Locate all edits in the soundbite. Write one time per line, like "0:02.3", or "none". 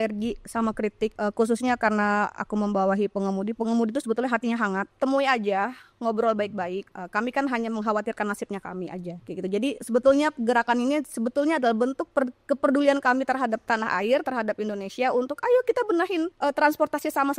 0:01.1
0:04.9
0:06.8
0:09.2
0:16.3

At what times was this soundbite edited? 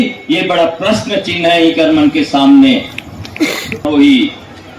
0:03.9

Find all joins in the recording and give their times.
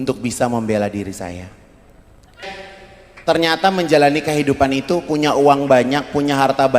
0:02.5

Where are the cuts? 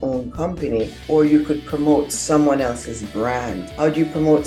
none

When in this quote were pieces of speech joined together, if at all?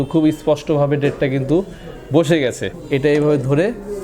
0:02.7

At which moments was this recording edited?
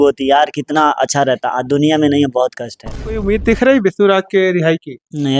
0:03.1

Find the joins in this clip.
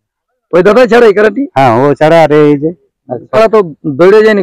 0:03.4

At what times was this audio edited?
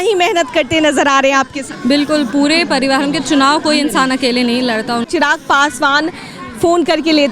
0:01.6
0:05.0

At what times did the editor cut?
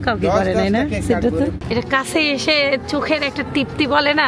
0:01.6

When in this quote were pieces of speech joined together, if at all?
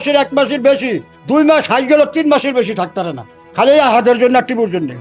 none

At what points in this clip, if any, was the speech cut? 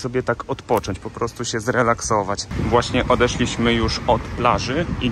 0:02.4

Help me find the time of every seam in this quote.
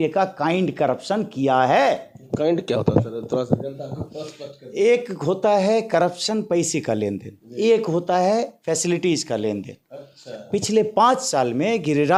none

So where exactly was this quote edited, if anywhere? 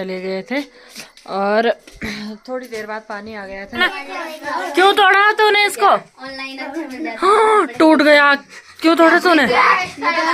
0:03.7

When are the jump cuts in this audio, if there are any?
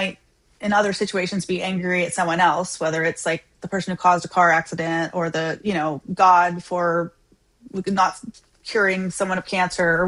none

